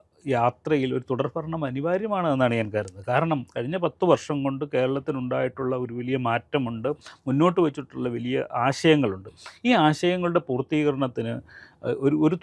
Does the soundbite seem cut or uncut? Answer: uncut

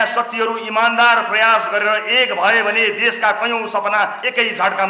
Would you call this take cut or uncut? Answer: uncut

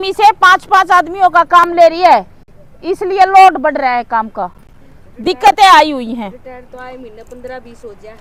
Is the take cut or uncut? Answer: uncut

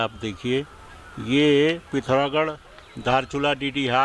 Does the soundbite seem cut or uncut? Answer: uncut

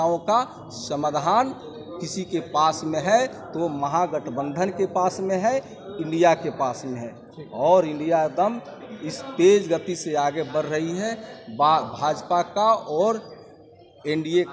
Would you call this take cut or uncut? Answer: uncut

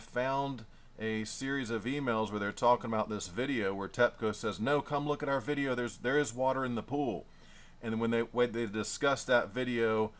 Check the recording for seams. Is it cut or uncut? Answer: cut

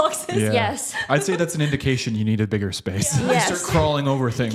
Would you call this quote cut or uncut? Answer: uncut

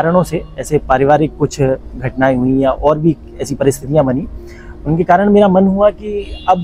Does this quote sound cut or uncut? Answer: uncut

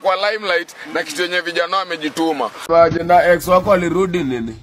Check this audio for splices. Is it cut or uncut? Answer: cut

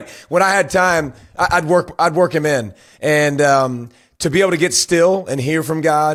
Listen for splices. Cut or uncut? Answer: uncut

